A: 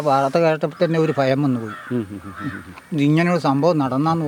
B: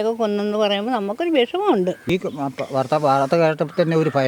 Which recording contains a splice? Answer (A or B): B